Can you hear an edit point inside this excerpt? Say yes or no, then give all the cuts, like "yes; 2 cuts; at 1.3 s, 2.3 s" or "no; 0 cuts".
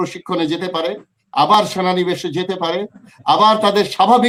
no; 0 cuts